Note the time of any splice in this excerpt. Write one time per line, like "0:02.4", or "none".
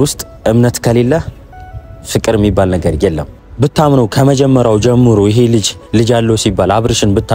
0:03.5